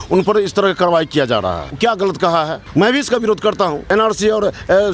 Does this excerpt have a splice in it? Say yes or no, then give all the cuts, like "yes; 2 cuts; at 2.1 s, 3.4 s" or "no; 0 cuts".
yes; 3 cuts; at 1.7 s, 2.6 s, 3.8 s